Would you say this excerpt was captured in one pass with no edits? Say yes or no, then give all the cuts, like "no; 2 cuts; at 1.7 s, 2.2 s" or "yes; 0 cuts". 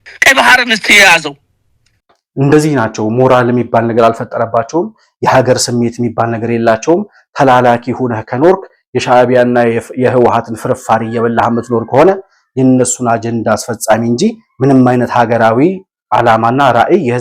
yes; 0 cuts